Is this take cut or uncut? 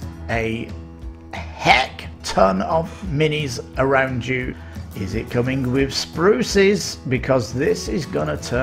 cut